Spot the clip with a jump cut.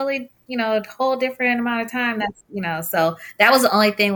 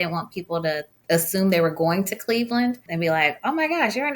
second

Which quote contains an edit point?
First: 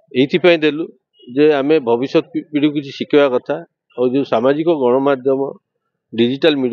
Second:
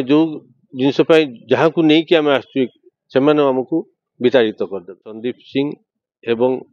second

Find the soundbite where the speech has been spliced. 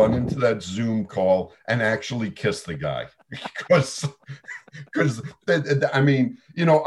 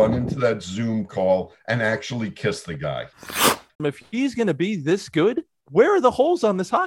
second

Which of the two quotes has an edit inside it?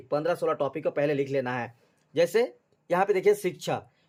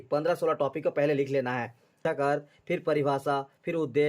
second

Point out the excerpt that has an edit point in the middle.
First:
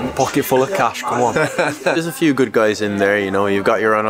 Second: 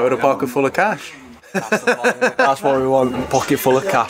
first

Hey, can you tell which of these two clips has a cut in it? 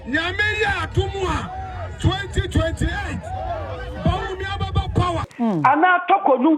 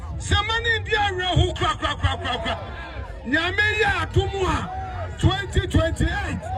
first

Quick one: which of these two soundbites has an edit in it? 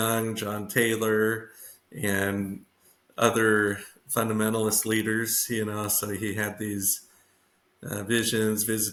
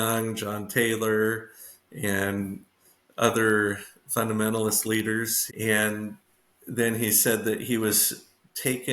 second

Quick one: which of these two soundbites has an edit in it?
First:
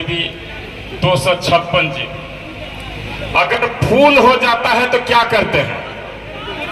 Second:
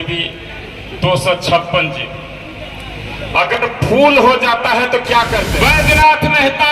second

